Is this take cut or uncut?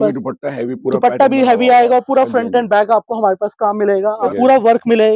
cut